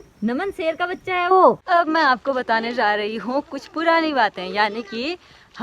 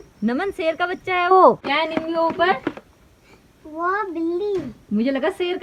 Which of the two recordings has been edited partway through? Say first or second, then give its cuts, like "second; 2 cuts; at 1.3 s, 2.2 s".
first; 1 cut; at 1.7 s